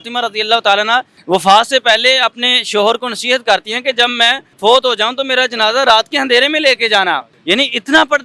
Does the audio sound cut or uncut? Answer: cut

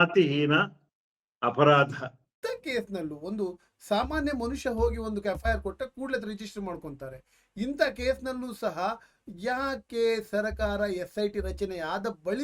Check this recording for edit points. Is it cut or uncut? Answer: cut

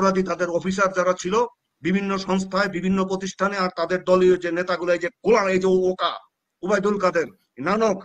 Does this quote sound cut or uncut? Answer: uncut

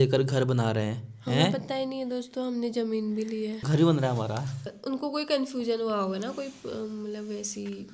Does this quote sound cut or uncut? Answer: uncut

